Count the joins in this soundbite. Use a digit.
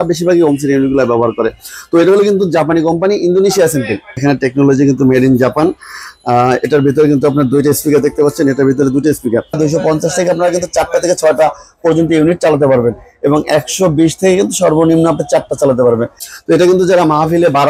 3